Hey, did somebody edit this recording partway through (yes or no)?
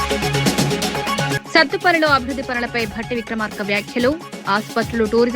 yes